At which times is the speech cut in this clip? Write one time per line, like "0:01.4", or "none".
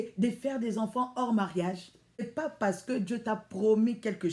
0:01.8